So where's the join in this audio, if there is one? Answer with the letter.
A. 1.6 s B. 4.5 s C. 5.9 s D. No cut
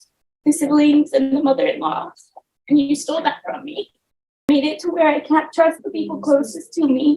B